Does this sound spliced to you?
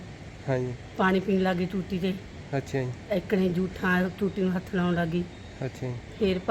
no; 0 cuts

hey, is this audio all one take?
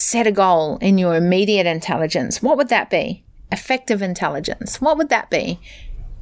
yes; 0 cuts

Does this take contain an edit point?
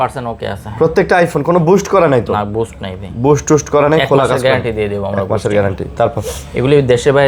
no; 0 cuts

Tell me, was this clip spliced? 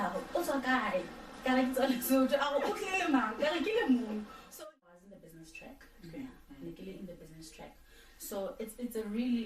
yes; 1 cut; at 4.4 s

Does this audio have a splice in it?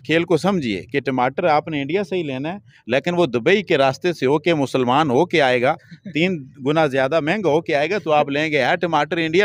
no; 0 cuts

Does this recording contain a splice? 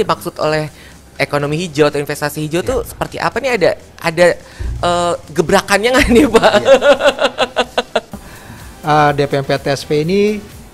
yes; 1 cut; at 8.1 s

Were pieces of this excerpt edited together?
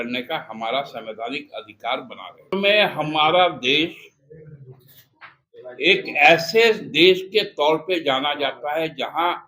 yes; 1 cut; at 2.5 s

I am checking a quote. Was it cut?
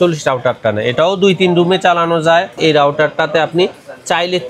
yes; 1 cut; at 2.5 s

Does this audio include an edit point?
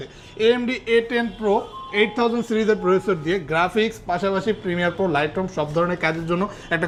no; 0 cuts

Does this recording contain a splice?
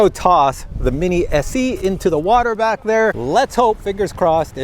yes; 1 cut; at 3.2 s

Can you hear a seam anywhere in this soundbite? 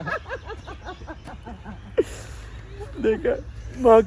no; 0 cuts

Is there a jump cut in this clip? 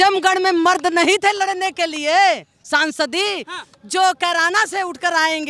no; 0 cuts

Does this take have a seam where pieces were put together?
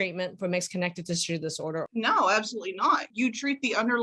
yes; 2 cuts; at 1.9 s, 3.1 s

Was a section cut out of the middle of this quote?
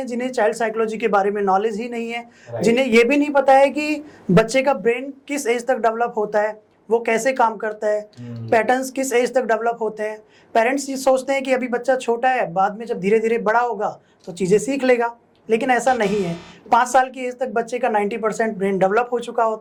no; 0 cuts

